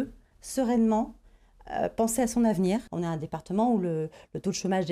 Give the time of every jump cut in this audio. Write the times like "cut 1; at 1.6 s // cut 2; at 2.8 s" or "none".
cut 1; at 2.9 s